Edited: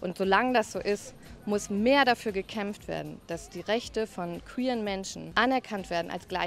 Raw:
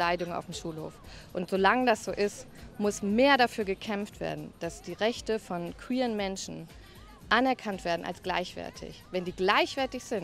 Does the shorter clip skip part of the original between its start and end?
yes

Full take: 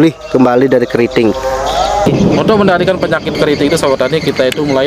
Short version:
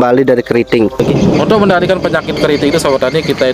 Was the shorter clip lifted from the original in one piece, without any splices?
no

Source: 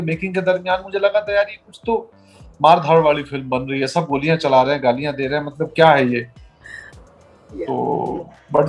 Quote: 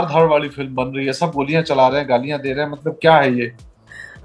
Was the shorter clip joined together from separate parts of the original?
no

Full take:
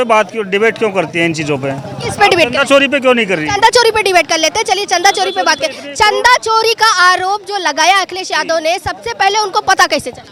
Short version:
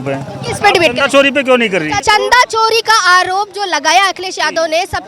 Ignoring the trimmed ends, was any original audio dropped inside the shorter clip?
yes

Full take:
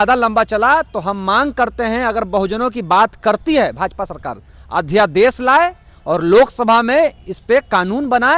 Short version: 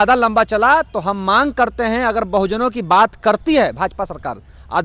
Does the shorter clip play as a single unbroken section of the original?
yes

